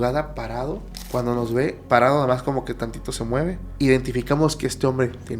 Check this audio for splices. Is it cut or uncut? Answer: cut